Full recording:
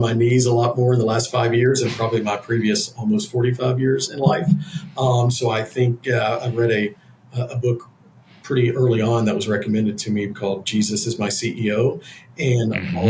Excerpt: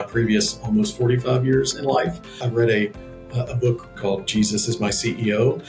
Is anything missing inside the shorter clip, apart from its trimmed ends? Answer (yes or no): yes